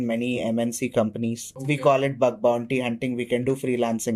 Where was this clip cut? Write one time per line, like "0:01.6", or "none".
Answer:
0:01.5